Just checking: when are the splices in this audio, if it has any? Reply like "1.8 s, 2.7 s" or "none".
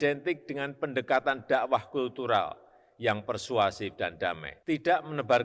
4.5 s